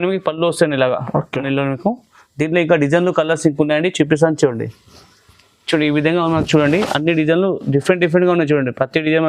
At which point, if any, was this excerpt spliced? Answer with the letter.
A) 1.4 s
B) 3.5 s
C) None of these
A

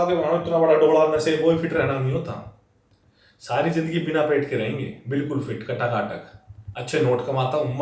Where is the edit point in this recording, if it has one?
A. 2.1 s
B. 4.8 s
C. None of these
C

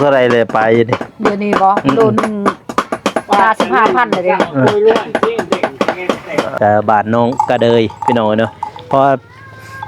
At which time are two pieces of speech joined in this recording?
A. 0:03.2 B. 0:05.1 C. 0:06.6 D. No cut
C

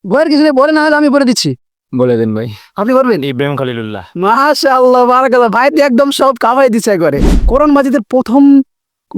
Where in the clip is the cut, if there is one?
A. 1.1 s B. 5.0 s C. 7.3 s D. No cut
C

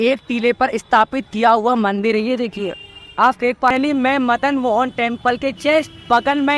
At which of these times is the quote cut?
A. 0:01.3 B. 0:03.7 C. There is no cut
B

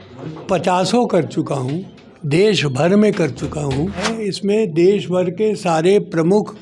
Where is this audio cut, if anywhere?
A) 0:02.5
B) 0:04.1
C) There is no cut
B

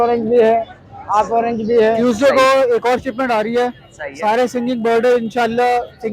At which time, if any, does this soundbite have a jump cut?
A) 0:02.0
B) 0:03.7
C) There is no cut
A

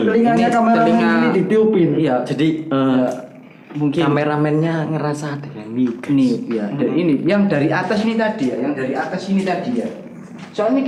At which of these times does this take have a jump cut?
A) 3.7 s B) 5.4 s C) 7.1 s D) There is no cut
D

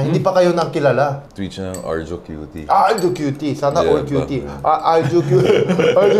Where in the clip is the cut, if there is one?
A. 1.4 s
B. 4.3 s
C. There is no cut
A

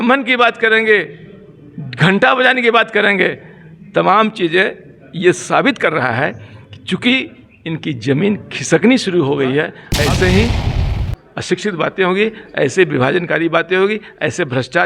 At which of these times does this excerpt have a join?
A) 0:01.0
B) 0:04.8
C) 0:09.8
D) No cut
C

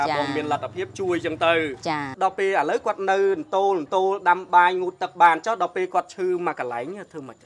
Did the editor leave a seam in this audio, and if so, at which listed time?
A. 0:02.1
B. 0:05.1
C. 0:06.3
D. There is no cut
A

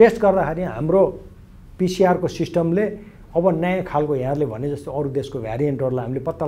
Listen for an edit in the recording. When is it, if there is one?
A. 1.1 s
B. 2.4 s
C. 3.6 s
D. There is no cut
D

